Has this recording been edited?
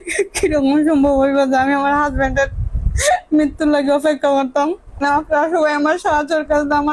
yes; 1 cut; at 5.0 s

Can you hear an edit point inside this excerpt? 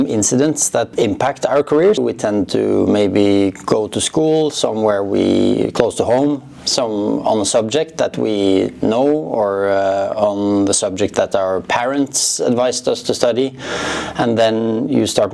yes; 2 cuts; at 0.9 s, 2.0 s

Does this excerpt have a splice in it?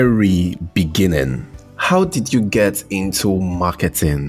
no; 0 cuts

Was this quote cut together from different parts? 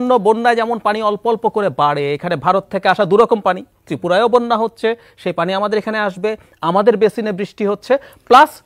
no; 0 cuts

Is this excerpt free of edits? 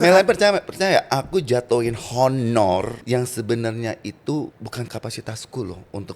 no; 2 cuts; at 3.0 s, 4.8 s

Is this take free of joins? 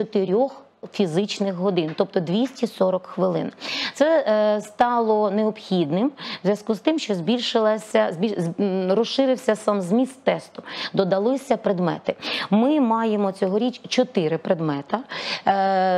yes; 0 cuts

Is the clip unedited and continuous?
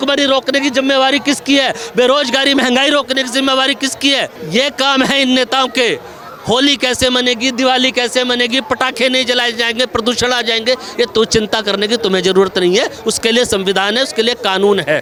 yes; 0 cuts

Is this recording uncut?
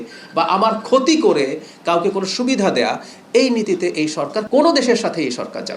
no; 1 cut; at 4.4 s

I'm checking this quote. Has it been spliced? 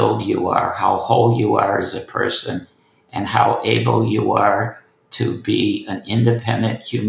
no; 0 cuts

